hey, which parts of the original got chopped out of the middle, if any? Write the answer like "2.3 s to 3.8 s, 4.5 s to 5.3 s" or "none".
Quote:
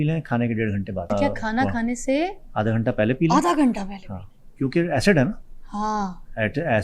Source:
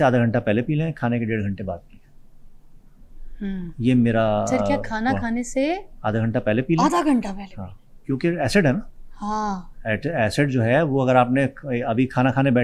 1.8 s to 4.6 s